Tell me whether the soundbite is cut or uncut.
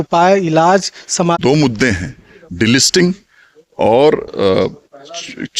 cut